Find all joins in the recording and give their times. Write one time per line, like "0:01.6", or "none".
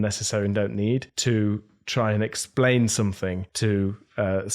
0:01.1
0:03.5

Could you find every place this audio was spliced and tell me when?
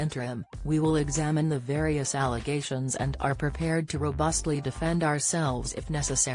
none

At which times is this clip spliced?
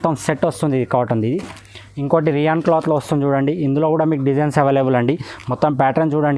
none

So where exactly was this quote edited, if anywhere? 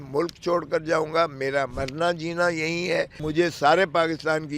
0:01.8
0:03.2

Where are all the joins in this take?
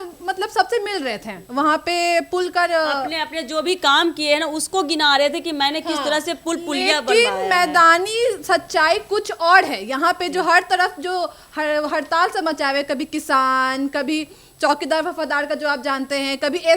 none

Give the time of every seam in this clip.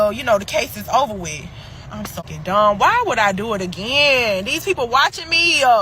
0:02.3

